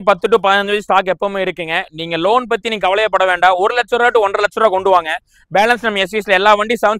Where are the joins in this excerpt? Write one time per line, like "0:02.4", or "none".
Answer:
none